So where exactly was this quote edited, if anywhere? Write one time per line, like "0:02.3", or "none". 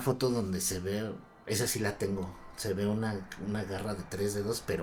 none